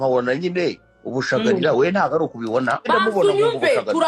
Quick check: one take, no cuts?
no; 1 cut; at 2.9 s

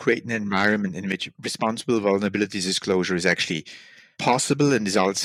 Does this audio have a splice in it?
no; 0 cuts

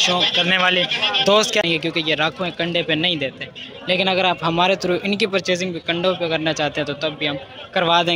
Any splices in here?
yes; 1 cut; at 1.6 s

